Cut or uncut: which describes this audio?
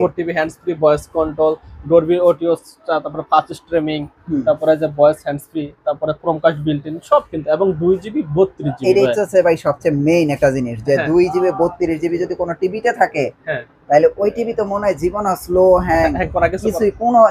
uncut